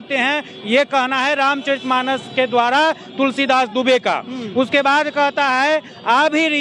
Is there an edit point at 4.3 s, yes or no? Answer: no